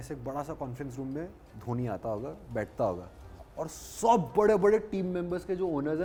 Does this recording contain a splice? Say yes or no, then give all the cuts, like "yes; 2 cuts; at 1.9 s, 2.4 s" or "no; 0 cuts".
no; 0 cuts